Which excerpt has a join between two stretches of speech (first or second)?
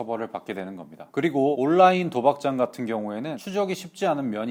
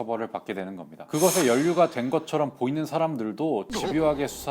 second